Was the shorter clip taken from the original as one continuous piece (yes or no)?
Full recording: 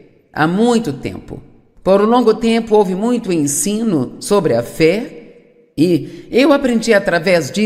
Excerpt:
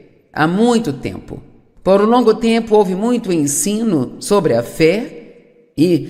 yes